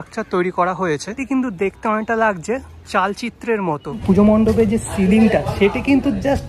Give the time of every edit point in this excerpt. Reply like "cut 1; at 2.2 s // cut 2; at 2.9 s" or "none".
cut 1; at 1.2 s // cut 2; at 4.0 s